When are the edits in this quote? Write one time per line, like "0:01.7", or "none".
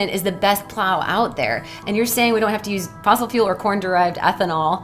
0:03.0